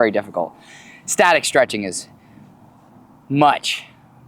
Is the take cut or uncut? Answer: uncut